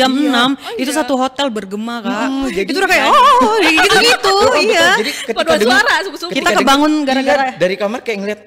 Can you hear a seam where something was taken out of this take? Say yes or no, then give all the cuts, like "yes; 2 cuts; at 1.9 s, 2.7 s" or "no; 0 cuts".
no; 0 cuts